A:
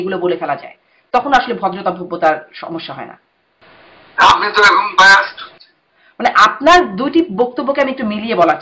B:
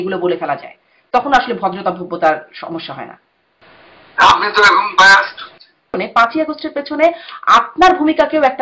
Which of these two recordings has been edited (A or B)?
B